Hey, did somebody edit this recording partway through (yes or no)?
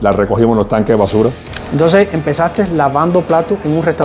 yes